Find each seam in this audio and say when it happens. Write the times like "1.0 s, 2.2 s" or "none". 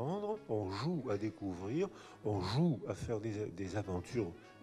none